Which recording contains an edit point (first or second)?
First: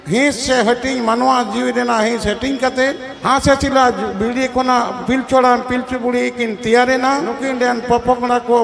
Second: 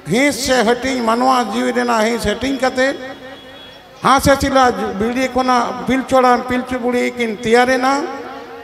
first